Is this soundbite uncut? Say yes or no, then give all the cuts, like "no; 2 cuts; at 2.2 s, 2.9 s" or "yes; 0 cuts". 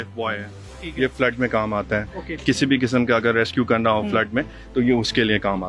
yes; 0 cuts